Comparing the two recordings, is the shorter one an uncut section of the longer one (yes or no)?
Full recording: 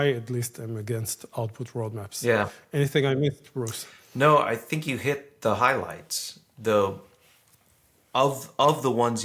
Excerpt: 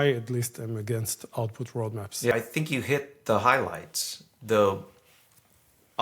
no